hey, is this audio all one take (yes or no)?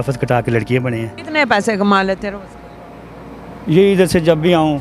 no